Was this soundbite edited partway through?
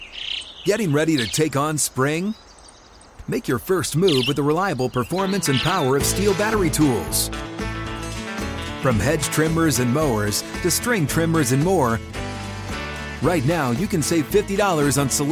no; 0 cuts

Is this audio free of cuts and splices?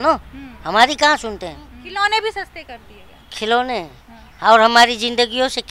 no; 1 cut; at 1.8 s

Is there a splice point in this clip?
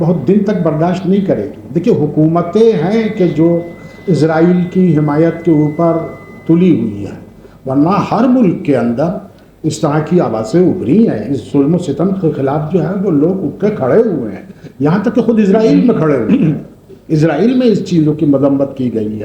no; 0 cuts

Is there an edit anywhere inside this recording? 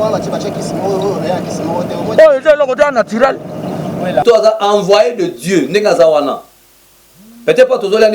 yes; 1 cut; at 4.2 s

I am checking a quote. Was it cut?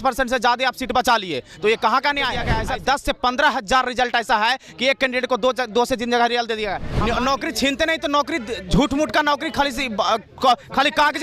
yes; 2 cuts; at 2.5 s, 6.9 s

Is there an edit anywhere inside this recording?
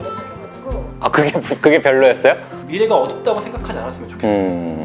yes; 1 cut; at 2.6 s

